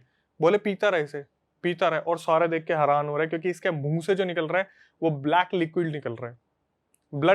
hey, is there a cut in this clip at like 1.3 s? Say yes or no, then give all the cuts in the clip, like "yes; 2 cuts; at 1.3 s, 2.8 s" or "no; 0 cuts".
no; 0 cuts